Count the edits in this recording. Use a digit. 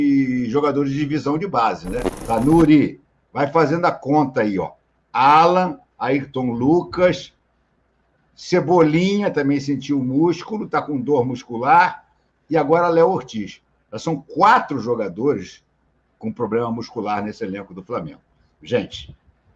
1